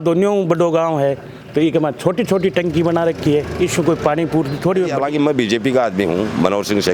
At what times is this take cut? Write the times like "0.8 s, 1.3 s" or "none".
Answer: 4.9 s